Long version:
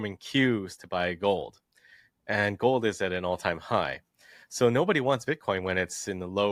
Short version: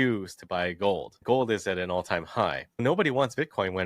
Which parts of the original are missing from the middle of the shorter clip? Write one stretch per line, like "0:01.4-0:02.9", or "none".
0:01.6-0:02.5
0:04.2-0:04.7